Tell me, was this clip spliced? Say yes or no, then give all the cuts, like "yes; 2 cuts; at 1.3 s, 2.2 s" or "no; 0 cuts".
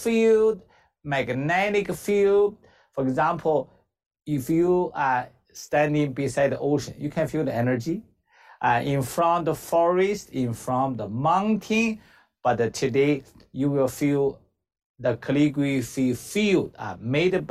no; 0 cuts